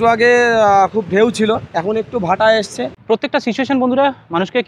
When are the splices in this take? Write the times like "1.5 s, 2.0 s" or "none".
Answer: 3.0 s